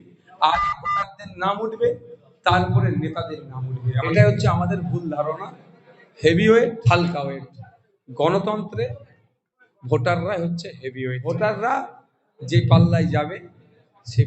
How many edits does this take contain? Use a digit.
3